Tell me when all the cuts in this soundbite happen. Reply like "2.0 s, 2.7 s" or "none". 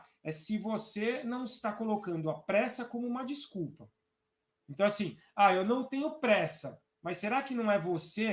none